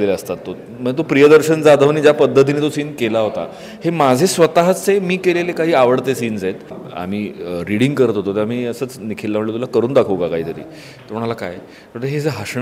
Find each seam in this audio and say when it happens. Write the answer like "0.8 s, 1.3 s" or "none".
6.9 s